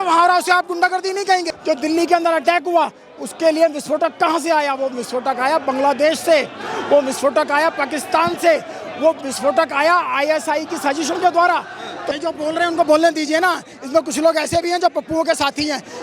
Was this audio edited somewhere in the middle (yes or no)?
yes